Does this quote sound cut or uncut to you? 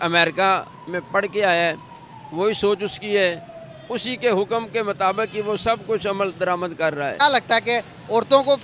cut